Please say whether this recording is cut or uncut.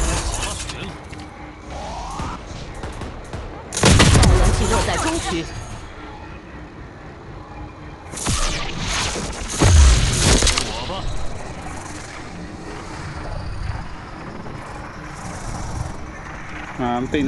uncut